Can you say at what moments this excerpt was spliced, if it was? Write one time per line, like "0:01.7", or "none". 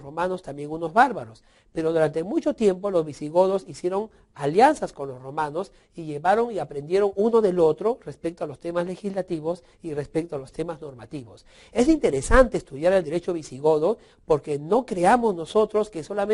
0:04.5